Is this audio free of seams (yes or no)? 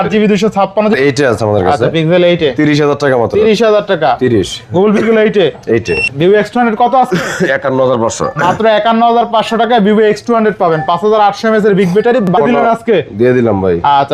no